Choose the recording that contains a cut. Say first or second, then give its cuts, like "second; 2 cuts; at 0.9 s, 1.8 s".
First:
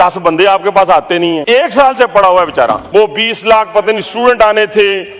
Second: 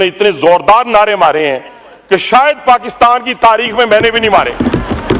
first; 2 cuts; at 1.4 s, 2.8 s